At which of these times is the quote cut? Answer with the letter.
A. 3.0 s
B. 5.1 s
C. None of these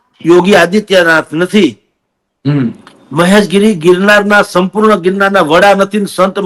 C